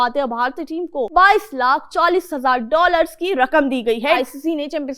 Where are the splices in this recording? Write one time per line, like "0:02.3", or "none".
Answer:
0:01.1
0:04.2